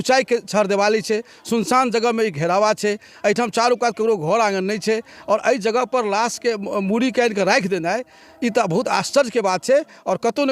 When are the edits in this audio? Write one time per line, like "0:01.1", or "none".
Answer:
none